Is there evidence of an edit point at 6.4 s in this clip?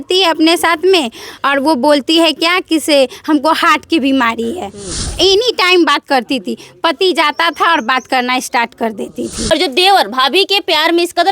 no; 2 cuts; at 5.1 s, 9.4 s

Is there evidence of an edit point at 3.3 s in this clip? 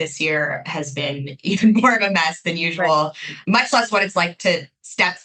yes; 1 cut; at 3.3 s

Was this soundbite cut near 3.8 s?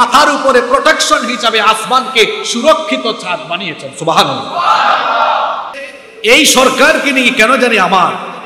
no; 1 cut; at 5.7 s

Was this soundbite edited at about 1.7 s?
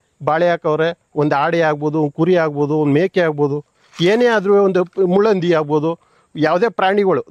no; 0 cuts

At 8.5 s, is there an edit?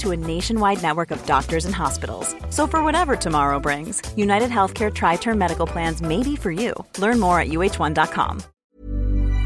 yes; 1 cut; at 8.5 s

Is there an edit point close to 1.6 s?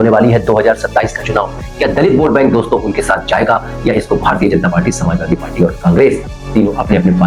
no; 0 cuts

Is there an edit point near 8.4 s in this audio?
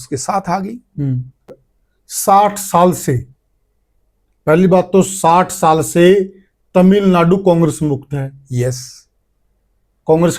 no; 1 cut; at 1.5 s

